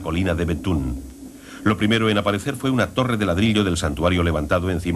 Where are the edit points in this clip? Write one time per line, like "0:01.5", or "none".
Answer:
0:02.9